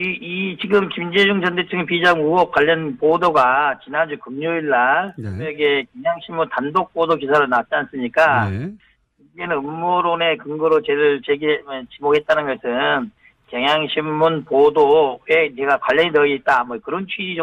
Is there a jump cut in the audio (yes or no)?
yes